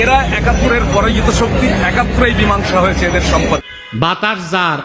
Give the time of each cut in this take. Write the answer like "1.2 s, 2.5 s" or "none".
3.6 s

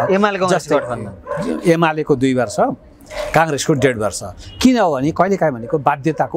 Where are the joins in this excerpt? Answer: none

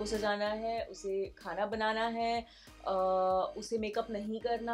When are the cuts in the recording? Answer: none

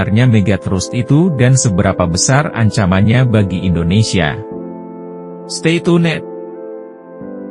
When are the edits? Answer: none

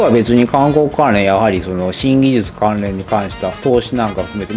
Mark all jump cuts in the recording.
3.6 s

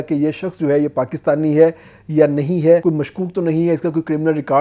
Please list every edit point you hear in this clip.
2.8 s

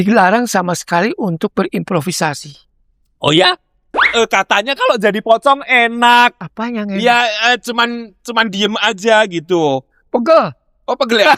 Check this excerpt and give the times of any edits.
4.0 s, 6.5 s

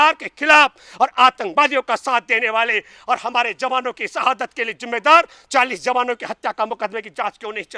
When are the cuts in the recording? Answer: none

